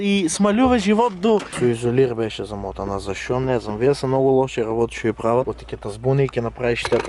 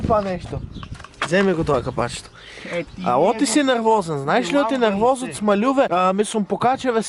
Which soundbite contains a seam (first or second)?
first